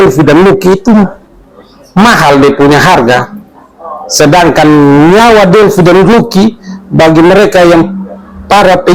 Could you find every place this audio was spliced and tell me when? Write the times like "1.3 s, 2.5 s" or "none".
none